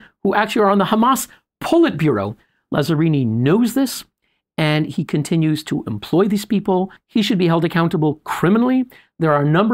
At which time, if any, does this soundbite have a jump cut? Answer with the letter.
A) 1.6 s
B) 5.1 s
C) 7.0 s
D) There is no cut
C